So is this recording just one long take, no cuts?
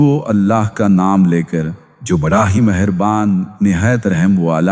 yes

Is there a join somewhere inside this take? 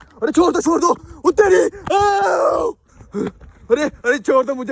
yes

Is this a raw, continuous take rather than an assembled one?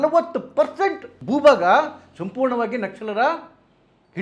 no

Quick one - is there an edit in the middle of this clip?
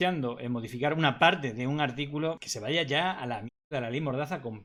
no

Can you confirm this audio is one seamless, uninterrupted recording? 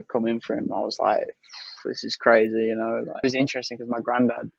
no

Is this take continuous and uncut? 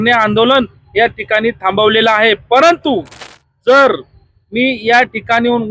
yes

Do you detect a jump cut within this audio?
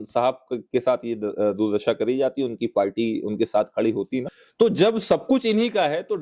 yes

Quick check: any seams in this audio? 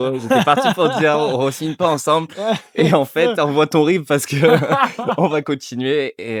no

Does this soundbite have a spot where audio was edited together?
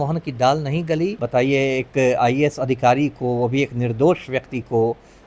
yes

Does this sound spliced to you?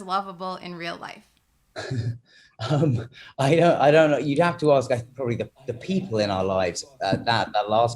no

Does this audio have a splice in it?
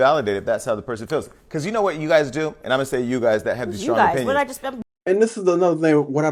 no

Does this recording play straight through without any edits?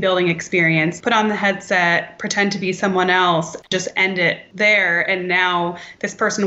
no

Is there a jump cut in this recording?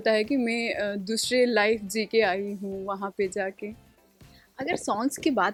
no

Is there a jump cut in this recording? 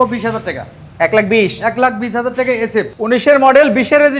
yes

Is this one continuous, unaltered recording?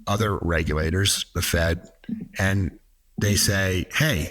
yes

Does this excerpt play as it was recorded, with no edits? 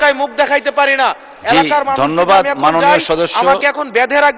yes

